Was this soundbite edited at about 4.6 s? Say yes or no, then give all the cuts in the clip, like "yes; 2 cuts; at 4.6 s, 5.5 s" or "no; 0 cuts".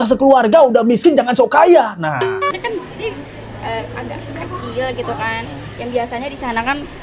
no; 1 cut; at 2.5 s